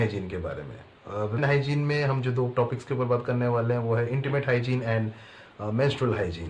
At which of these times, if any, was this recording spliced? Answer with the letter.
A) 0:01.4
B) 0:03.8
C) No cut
A